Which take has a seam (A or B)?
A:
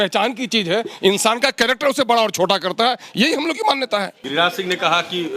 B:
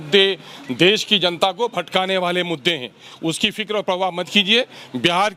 A